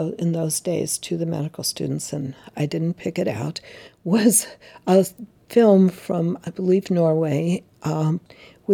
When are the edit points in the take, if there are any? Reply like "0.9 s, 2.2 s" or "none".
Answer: none